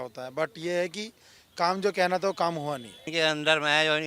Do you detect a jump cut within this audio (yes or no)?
yes